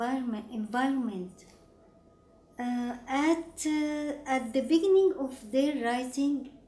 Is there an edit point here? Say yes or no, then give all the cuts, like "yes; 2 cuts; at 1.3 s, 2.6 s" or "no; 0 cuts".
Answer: no; 0 cuts